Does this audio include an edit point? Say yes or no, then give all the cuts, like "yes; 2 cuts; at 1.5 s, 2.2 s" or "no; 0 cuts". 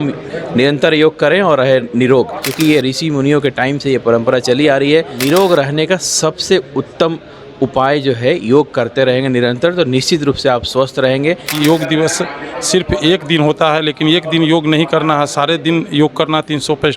yes; 3 cuts; at 2.5 s, 5.2 s, 11.5 s